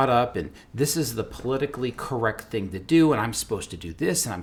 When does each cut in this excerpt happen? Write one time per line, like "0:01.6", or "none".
none

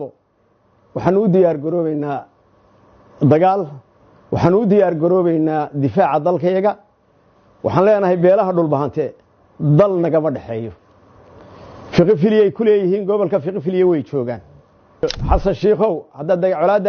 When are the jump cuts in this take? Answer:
0:15.0

